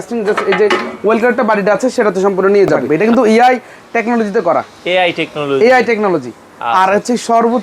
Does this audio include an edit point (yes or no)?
yes